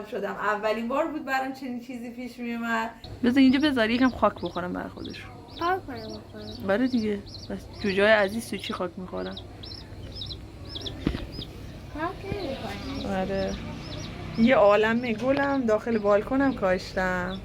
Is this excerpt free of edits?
no; 1 cut; at 3.0 s

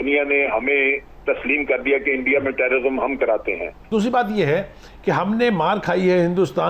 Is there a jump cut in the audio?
yes; 1 cut; at 3.7 s

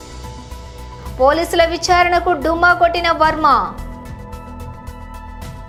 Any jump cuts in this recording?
no; 0 cuts

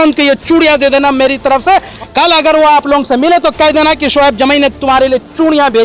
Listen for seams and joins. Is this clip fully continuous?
no; 1 cut; at 1.9 s

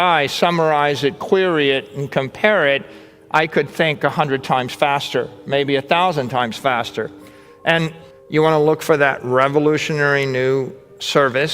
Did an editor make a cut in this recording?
yes; 1 cut; at 8.0 s

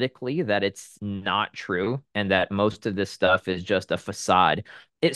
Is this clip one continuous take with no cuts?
no; 1 cut; at 0.9 s

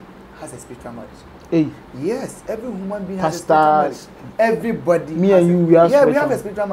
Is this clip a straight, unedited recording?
yes; 0 cuts

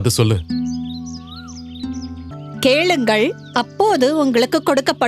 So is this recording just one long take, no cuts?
no; 1 cut; at 2.4 s

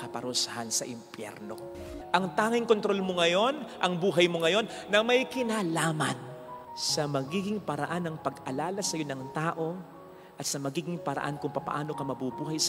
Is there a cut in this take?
yes; 1 cut; at 1.9 s

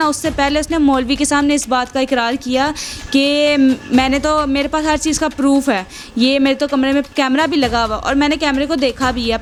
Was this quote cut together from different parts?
no; 0 cuts

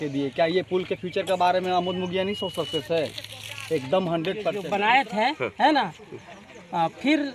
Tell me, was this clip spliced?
yes; 1 cut; at 4.6 s

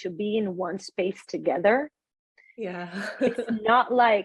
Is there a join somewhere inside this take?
no; 0 cuts

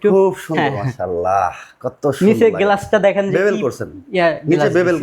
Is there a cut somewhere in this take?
no; 0 cuts

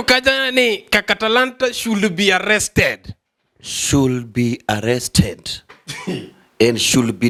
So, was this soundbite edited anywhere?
no; 0 cuts

